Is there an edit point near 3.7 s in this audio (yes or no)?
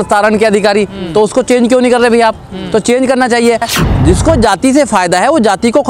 yes